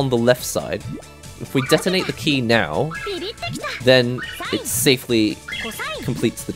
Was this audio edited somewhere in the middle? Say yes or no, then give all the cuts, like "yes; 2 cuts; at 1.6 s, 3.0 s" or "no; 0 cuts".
no; 0 cuts